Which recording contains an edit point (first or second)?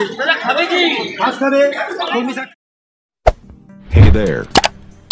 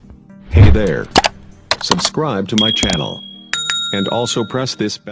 first